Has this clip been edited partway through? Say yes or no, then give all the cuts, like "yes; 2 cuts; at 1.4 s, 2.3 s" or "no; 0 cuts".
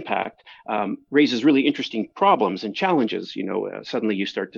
no; 0 cuts